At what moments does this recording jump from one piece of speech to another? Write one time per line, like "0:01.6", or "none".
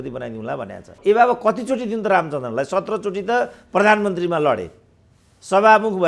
0:01.0